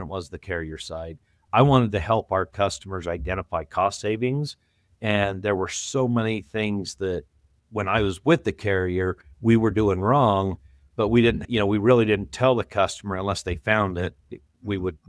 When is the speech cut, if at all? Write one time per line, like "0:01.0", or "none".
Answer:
0:11.4